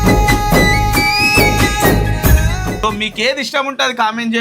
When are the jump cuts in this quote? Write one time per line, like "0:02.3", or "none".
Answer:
0:02.8